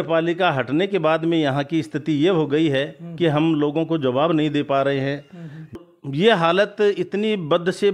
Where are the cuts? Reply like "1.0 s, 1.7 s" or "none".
5.8 s